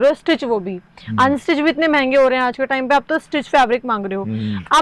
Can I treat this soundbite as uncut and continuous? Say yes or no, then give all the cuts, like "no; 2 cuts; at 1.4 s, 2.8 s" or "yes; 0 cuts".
yes; 0 cuts